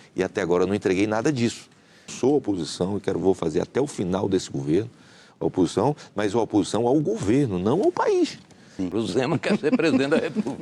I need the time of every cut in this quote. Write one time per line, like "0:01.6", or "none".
0:02.1
0:08.9